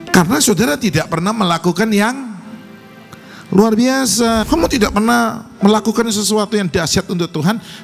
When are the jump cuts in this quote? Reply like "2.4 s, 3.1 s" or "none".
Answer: 4.5 s